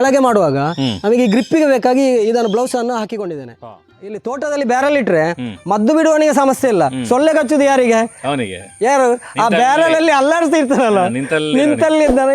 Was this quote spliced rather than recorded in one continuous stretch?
yes; 1 cut; at 4.0 s

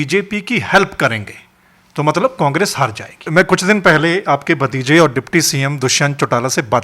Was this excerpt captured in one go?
no; 1 cut; at 3.2 s

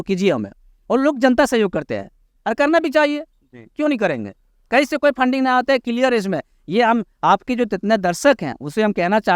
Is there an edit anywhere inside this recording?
no; 0 cuts

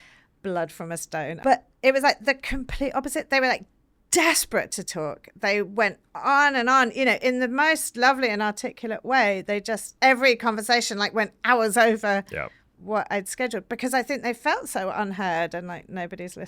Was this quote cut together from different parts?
yes; 1 cut; at 1.4 s

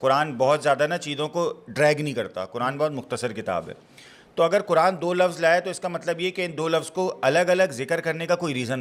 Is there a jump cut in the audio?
no; 0 cuts

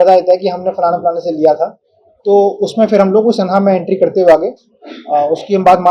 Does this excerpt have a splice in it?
no; 0 cuts

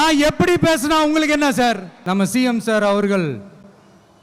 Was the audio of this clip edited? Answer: yes; 1 cut; at 1.9 s

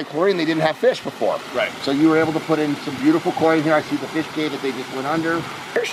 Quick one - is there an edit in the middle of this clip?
no; 0 cuts

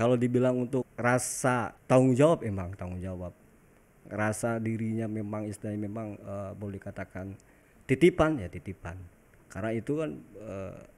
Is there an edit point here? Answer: yes; 2 cuts; at 0.9 s, 1.7 s

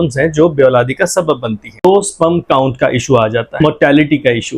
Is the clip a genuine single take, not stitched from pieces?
no; 2 cuts; at 1.8 s, 3.6 s

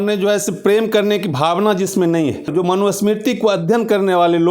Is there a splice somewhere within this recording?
yes; 1 cut; at 2.5 s

